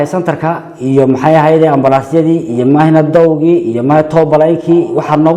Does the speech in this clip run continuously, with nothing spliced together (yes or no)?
yes